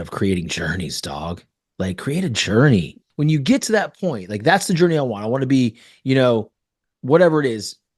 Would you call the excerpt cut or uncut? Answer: cut